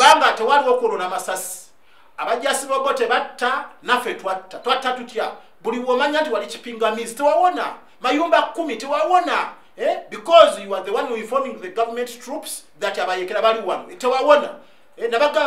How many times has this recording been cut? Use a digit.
0